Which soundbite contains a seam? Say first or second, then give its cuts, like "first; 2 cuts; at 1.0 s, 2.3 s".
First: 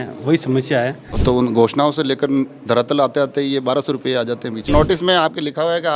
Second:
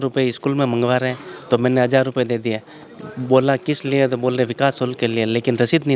first; 2 cuts; at 1.1 s, 4.7 s